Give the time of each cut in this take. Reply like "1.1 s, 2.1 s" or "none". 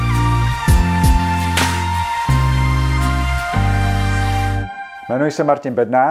4.9 s